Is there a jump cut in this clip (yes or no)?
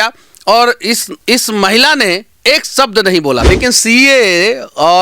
yes